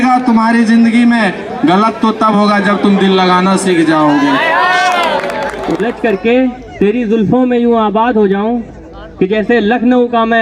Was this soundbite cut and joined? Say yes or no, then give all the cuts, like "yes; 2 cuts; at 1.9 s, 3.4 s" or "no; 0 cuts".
yes; 1 cut; at 5.6 s